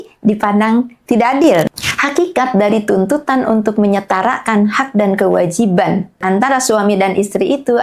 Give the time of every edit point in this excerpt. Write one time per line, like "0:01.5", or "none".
0:01.7
0:06.2